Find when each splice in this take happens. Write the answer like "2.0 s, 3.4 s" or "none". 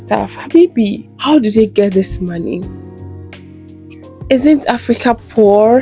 1.1 s